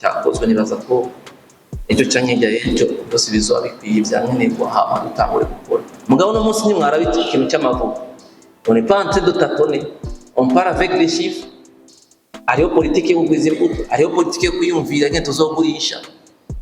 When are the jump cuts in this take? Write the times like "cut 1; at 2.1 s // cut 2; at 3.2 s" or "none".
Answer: cut 1; at 5.9 s